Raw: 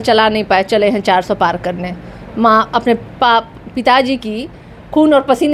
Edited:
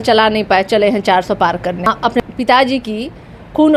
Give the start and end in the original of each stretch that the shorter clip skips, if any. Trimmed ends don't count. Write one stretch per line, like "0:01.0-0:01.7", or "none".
0:02.2-0:03.6